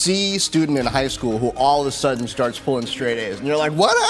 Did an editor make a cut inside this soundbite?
no; 0 cuts

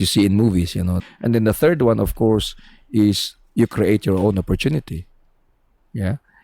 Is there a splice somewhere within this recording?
yes; 1 cut; at 1.0 s

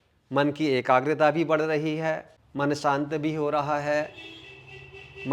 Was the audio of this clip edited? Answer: yes; 1 cut; at 2.4 s

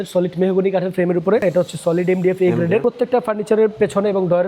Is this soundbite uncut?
no; 2 cuts; at 1.4 s, 2.8 s

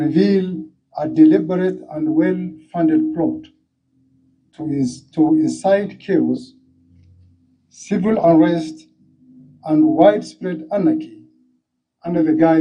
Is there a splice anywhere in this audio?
no; 0 cuts

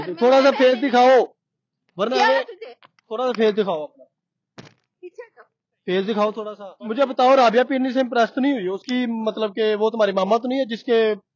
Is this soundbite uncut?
yes; 0 cuts

